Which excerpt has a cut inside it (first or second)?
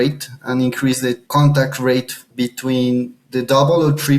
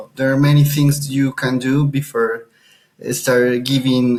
first